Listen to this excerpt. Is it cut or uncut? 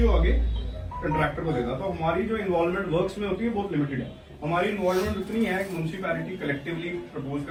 uncut